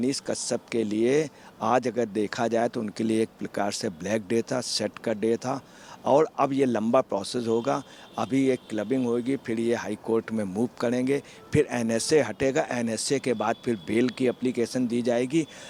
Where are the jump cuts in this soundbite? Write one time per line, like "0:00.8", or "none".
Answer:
none